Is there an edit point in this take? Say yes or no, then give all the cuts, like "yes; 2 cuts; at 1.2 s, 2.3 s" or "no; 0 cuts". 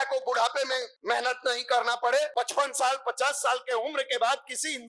yes; 2 cuts; at 0.9 s, 2.3 s